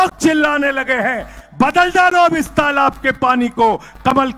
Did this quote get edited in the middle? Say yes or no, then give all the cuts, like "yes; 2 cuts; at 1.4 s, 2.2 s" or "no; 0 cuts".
no; 0 cuts